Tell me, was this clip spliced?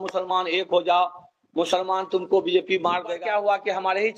yes; 1 cut; at 3.2 s

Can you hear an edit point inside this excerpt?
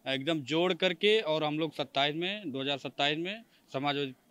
no; 0 cuts

